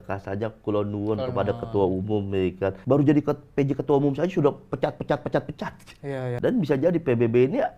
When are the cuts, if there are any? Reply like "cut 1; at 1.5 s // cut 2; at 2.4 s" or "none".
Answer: cut 1; at 2.8 s // cut 2; at 6.3 s